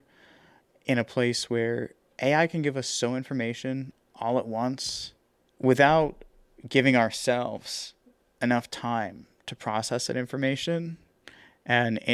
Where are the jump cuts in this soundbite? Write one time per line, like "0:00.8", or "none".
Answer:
none